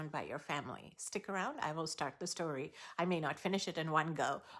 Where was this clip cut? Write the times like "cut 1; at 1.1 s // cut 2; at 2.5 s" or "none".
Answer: none

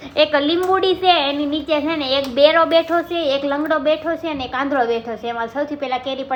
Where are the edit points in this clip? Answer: none

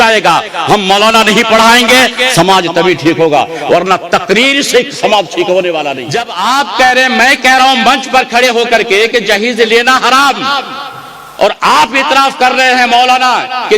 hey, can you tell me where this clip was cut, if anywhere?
cut 1; at 6.1 s

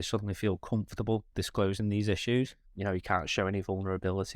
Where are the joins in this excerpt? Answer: cut 1; at 2.6 s

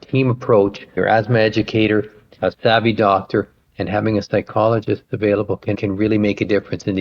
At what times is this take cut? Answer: cut 1; at 0.8 s // cut 2; at 2.4 s // cut 3; at 5.8 s

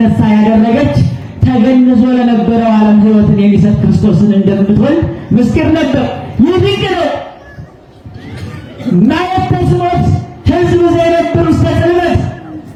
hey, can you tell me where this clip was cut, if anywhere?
none

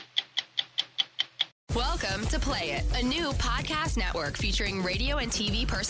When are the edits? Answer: cut 1; at 1.6 s

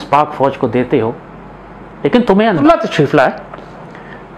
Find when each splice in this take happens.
cut 1; at 2.6 s

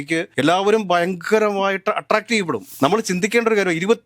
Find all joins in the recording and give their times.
cut 1; at 2.7 s

